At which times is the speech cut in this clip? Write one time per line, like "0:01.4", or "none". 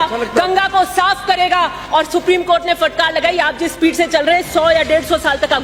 none